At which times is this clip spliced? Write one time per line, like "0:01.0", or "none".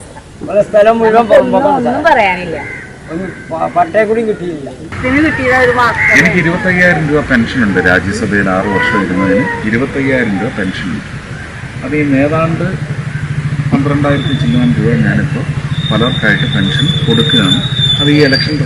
0:04.9